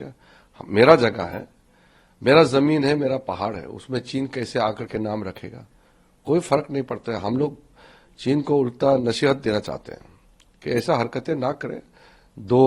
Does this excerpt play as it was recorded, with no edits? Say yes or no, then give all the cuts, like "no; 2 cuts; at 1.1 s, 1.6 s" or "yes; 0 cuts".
yes; 0 cuts